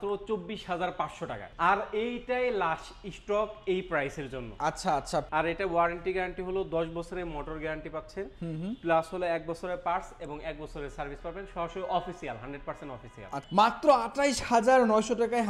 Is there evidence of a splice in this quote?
yes; 3 cuts; at 1.4 s, 5.2 s, 13.4 s

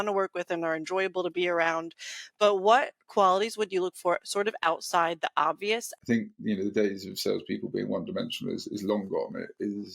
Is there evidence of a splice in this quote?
yes; 1 cut; at 5.9 s

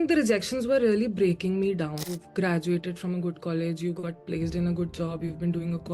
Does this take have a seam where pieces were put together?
yes; 1 cut; at 2.1 s

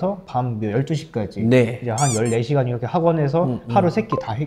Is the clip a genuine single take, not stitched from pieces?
yes; 0 cuts

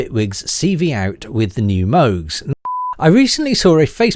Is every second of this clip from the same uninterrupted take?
no; 1 cut; at 2.7 s

